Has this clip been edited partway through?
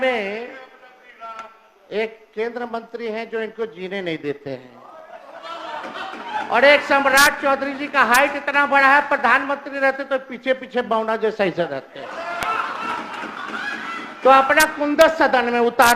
no; 0 cuts

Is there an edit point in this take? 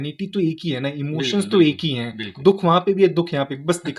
no; 0 cuts

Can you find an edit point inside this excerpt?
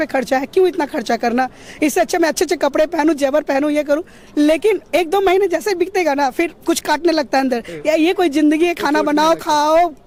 no; 0 cuts

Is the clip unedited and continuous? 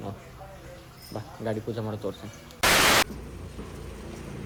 yes; 0 cuts

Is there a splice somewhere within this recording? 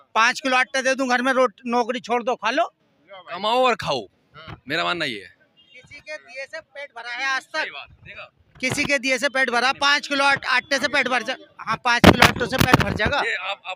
no; 0 cuts

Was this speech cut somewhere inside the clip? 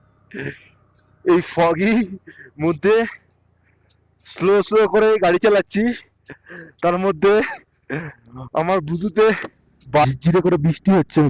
yes; 1 cut; at 10.0 s

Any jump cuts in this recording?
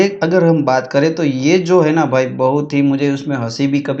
no; 0 cuts

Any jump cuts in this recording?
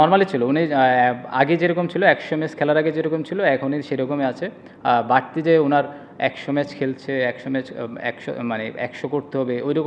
no; 0 cuts

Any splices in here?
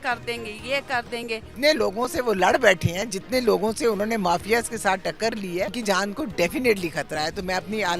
yes; 2 cuts; at 1.5 s, 5.8 s

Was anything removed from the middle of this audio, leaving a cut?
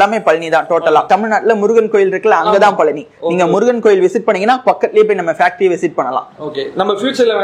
no; 0 cuts

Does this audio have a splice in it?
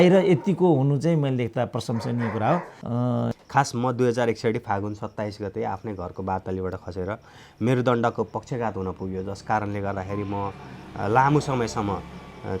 yes; 1 cut; at 2.8 s

